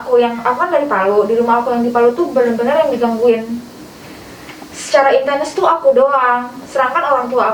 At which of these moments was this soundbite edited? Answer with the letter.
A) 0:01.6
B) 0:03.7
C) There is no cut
C